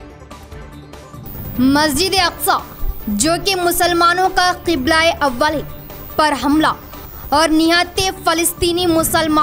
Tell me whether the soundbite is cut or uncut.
cut